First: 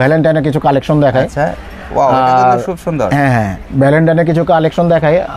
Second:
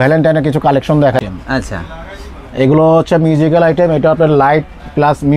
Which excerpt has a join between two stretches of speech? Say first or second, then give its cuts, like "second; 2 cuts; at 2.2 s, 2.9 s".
second; 1 cut; at 1.2 s